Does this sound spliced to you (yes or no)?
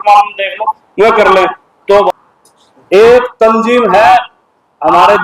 yes